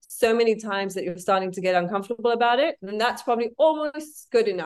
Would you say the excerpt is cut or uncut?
uncut